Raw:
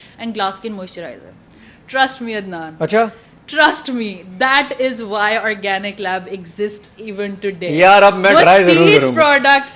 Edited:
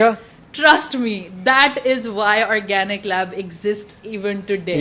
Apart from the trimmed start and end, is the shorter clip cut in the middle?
no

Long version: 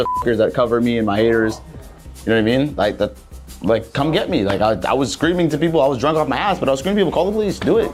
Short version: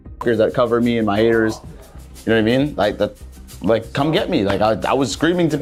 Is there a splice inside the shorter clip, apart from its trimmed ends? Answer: no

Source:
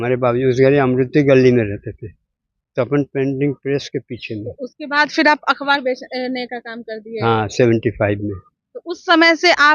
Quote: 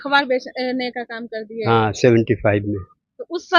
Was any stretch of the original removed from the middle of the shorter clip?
no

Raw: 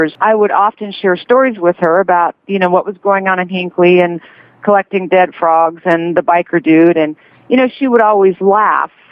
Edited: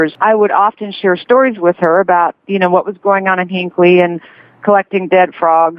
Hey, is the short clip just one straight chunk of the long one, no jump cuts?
yes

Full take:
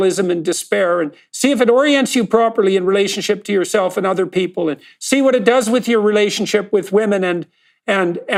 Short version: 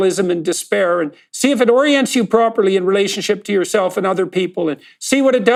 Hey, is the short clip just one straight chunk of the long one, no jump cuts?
yes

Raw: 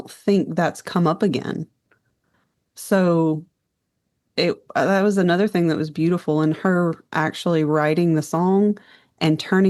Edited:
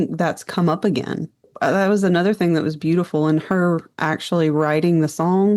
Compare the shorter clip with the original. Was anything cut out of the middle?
yes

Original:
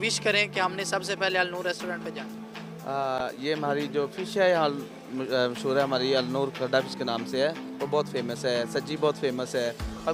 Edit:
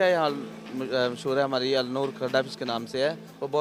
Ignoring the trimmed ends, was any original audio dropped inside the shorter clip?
no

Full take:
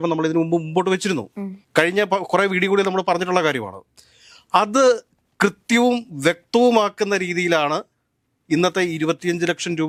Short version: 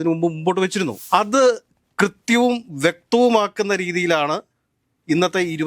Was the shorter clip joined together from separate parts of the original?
yes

